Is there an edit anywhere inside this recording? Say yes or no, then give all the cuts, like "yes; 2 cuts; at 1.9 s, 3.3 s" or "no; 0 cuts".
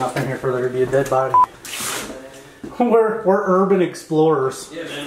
yes; 1 cut; at 1.5 s